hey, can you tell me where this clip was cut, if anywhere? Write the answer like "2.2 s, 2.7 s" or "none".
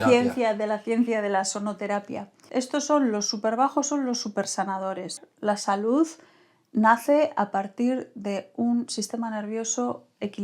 2.4 s, 5.3 s